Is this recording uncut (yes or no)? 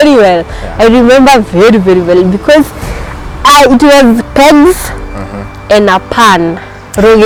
yes